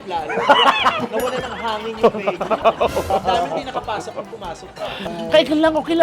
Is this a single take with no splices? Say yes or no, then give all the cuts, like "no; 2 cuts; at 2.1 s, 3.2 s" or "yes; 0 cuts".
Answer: no; 1 cut; at 5.0 s